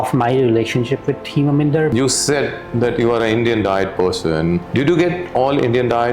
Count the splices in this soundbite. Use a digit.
2